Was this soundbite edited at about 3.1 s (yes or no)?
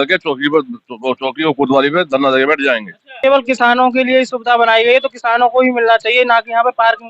yes